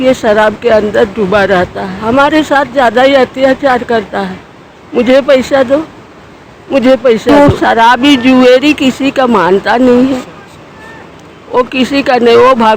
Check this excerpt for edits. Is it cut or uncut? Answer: cut